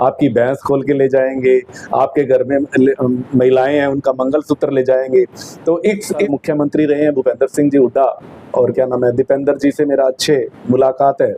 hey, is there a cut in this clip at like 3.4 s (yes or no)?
no